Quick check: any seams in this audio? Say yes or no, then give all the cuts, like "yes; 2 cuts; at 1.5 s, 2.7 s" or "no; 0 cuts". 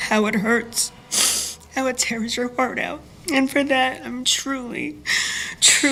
no; 0 cuts